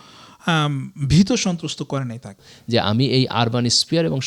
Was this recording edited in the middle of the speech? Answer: yes; 1 cut; at 2.4 s

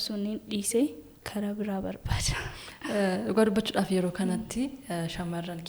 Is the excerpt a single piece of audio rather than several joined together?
yes; 0 cuts

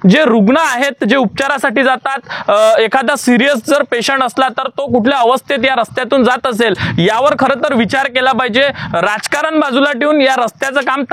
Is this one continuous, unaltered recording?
yes; 0 cuts

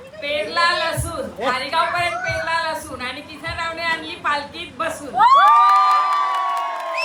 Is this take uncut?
yes; 0 cuts

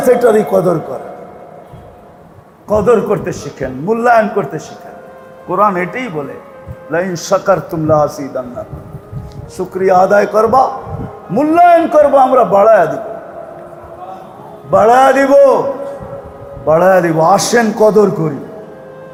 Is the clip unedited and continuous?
yes; 0 cuts

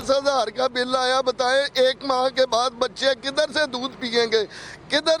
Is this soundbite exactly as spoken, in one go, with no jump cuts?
yes; 0 cuts

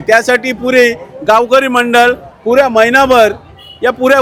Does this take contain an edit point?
no; 0 cuts

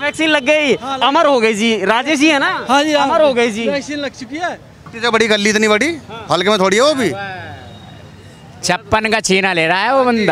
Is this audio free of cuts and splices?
no; 1 cut; at 4.8 s

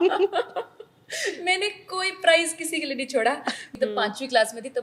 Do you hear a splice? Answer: yes; 1 cut; at 3.6 s

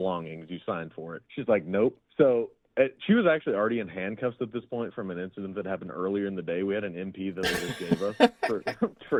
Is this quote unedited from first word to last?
yes; 0 cuts

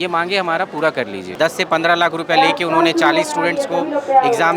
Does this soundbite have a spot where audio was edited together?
yes; 1 cut; at 1.3 s

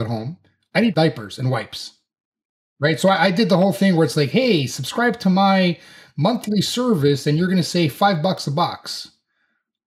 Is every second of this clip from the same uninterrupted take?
no; 1 cut; at 0.9 s

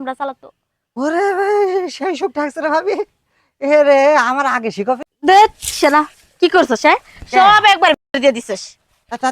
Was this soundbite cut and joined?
yes; 1 cut; at 5.1 s

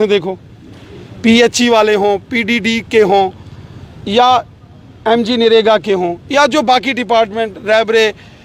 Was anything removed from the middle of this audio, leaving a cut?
no; 0 cuts

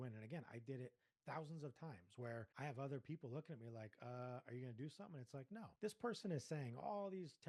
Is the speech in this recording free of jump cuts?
no; 2 cuts; at 2.5 s, 5.6 s

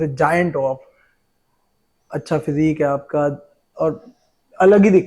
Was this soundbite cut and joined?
no; 0 cuts

